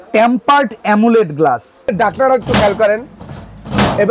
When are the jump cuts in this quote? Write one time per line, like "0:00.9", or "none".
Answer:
0:01.9